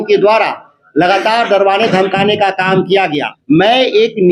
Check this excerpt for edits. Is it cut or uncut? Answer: cut